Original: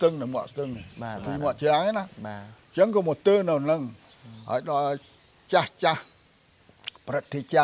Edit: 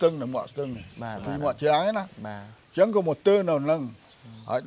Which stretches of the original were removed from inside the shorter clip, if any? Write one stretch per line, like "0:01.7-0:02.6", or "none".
none